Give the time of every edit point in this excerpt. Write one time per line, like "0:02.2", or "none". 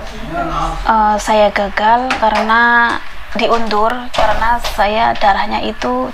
none